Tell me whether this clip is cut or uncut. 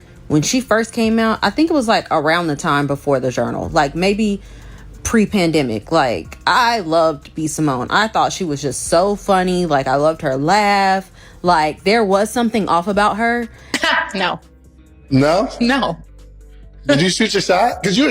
cut